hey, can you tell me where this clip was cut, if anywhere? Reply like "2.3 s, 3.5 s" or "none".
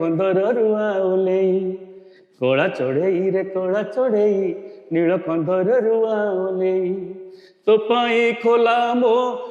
none